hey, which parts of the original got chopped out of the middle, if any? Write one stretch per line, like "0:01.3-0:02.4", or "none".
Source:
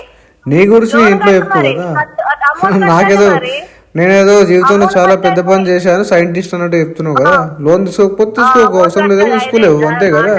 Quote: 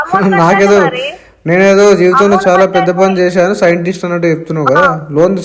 none